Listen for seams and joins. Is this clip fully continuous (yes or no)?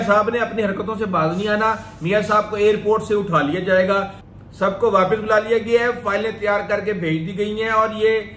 no